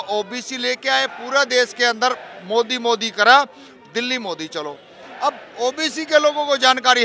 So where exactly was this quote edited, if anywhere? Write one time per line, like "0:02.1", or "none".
none